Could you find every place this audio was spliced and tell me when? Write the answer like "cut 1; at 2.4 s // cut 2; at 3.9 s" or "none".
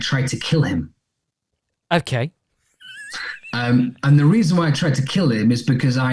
none